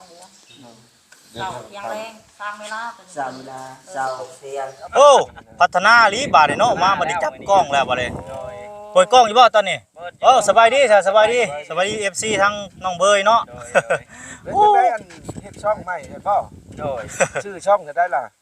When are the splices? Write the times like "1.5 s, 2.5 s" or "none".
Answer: 4.8 s